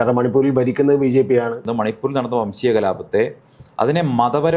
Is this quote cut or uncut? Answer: cut